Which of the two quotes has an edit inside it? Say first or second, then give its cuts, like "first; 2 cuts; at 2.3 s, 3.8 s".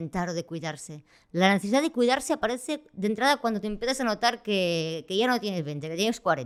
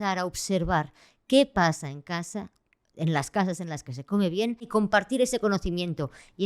second; 1 cut; at 4.7 s